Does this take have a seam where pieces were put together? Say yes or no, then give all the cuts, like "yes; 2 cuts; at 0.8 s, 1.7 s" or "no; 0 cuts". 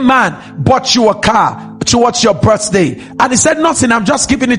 no; 0 cuts